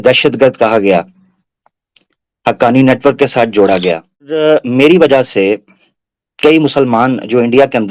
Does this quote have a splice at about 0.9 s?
no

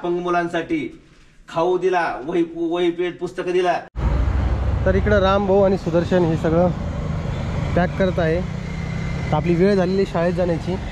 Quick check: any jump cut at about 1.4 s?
no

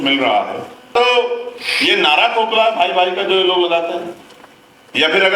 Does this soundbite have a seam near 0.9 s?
yes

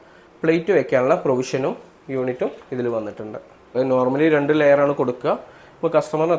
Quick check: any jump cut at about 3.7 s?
yes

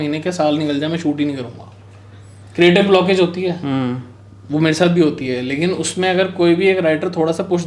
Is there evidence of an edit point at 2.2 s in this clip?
no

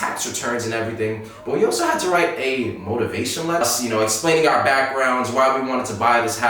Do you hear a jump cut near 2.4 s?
no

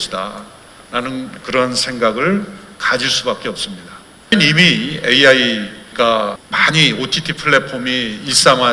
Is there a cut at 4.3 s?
yes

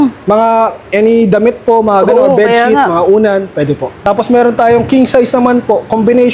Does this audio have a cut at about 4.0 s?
yes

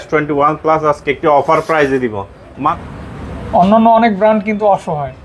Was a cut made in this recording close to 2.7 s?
yes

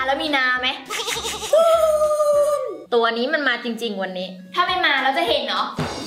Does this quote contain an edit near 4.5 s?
no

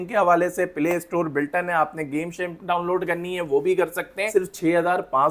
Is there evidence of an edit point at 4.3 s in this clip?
yes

